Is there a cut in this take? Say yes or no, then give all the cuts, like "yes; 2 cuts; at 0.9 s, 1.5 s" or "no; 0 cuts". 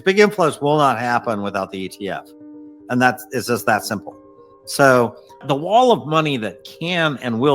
yes; 1 cut; at 5.4 s